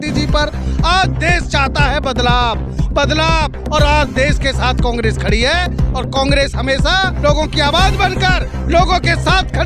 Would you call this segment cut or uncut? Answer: uncut